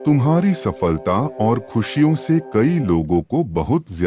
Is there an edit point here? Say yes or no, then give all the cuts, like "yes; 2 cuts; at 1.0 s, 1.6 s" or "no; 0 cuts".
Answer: no; 0 cuts